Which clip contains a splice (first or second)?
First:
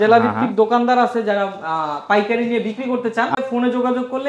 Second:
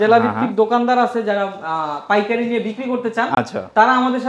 first